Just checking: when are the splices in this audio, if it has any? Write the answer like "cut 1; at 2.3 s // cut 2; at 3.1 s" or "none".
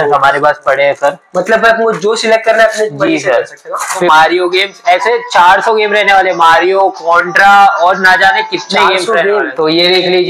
cut 1; at 4.0 s // cut 2; at 9.5 s